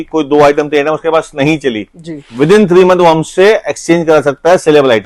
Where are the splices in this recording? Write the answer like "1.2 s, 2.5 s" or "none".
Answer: none